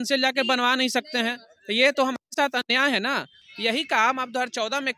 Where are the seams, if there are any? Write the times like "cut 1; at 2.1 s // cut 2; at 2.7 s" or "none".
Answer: cut 1; at 3.4 s